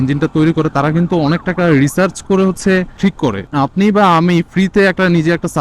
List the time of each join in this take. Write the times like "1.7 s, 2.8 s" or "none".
3.0 s